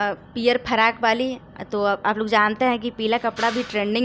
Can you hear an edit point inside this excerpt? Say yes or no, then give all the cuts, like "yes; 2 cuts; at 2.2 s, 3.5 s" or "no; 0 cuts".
no; 0 cuts